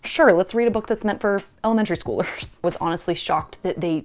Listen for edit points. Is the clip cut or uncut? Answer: cut